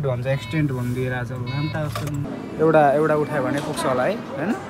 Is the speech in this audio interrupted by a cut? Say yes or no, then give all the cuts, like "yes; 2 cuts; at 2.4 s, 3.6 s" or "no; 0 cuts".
yes; 1 cut; at 2.2 s